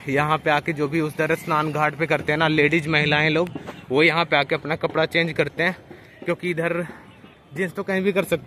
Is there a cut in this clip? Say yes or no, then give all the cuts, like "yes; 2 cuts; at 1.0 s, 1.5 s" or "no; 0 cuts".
no; 0 cuts